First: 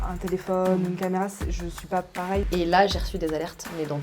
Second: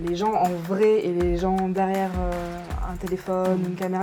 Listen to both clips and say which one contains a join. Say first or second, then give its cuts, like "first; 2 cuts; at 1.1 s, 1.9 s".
first; 1 cut; at 2.5 s